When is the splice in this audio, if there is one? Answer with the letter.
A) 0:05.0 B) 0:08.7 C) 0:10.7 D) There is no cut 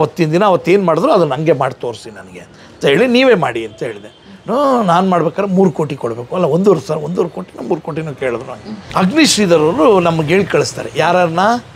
B